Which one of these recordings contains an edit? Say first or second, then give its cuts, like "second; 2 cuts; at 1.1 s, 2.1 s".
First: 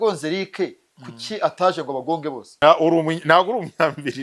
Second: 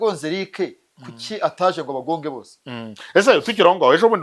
first; 1 cut; at 2.5 s